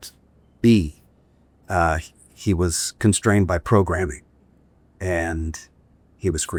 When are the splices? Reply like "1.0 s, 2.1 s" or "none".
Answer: none